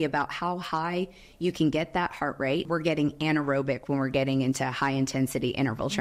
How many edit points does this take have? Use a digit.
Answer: 1